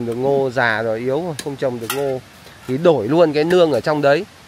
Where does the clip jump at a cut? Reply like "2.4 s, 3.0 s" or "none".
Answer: none